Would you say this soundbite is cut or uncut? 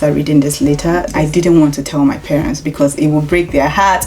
cut